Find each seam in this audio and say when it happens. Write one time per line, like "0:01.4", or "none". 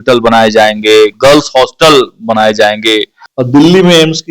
0:03.2